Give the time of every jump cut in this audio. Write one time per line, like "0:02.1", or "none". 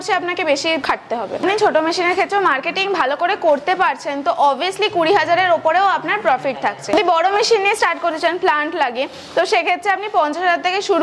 0:01.4
0:06.9